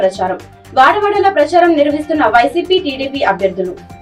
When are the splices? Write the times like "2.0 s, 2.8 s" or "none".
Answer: none